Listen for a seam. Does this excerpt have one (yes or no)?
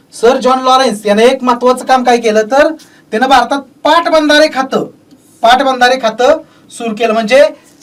no